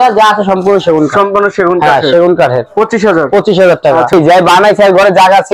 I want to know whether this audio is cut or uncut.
cut